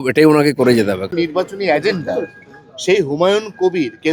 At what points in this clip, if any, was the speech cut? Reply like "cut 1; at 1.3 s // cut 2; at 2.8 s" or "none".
cut 1; at 1.0 s